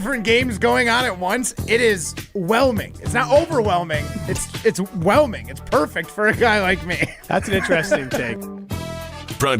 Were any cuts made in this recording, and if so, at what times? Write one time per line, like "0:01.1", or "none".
0:08.3